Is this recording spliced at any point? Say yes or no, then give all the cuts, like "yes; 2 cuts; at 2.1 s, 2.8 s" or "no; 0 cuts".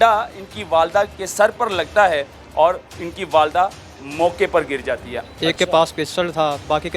yes; 1 cut; at 5.1 s